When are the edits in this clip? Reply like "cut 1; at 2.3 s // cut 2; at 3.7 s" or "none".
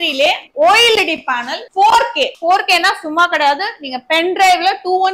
cut 1; at 2.4 s